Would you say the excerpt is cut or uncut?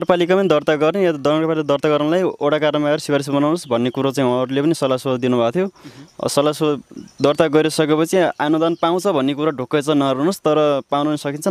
uncut